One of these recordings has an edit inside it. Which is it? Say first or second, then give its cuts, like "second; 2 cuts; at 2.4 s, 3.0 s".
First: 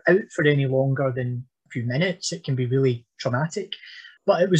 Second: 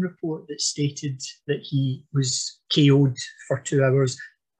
first; 1 cut; at 3.1 s